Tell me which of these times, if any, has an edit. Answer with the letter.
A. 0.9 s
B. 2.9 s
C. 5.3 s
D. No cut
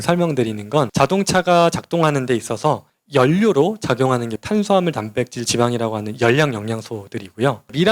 A